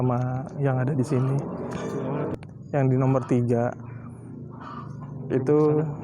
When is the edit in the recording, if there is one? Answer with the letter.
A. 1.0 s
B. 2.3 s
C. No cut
B